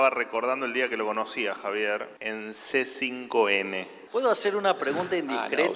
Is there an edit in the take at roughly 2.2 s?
yes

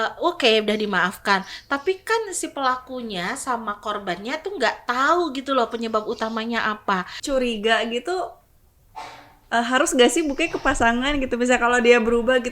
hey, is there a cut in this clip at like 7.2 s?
yes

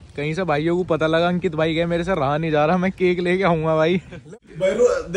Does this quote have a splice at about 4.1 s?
yes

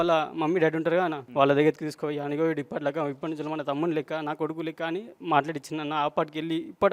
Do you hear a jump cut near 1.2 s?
yes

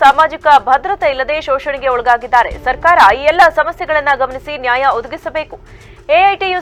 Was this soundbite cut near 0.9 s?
no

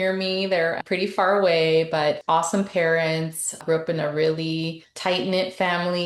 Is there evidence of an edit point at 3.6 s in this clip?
yes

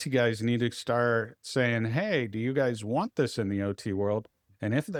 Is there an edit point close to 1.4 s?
no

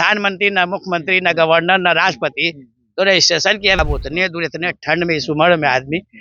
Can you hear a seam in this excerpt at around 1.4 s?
no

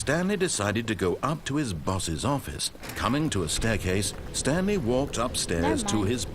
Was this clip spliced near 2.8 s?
yes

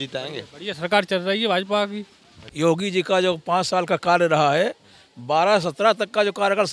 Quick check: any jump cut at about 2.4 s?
yes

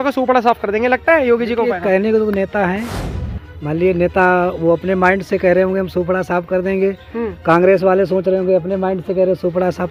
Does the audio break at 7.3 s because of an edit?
no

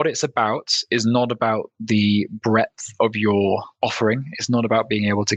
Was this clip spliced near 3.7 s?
yes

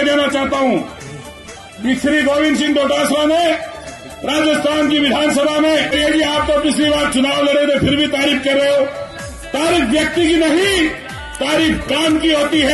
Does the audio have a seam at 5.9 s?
yes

